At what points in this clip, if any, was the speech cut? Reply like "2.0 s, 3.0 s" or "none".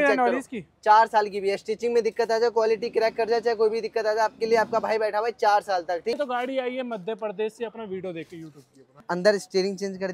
6.2 s, 8.9 s